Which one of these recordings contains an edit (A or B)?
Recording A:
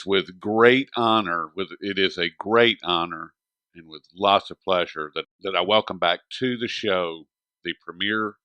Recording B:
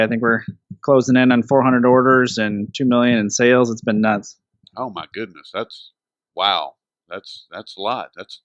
B